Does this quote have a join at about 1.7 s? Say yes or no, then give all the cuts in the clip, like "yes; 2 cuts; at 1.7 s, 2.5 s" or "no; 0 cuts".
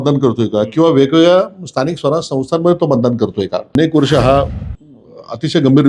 no; 1 cut; at 3.7 s